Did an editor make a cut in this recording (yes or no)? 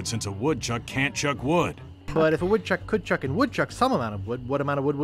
yes